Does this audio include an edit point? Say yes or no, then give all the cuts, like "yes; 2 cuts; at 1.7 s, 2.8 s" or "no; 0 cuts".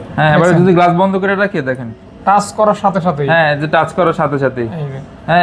no; 0 cuts